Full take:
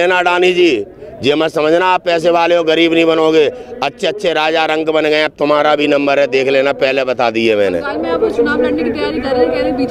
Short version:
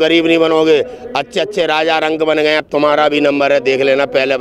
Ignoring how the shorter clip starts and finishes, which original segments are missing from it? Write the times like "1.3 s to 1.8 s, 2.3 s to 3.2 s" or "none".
none